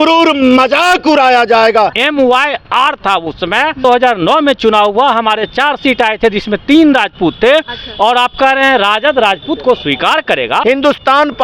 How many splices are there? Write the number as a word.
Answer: three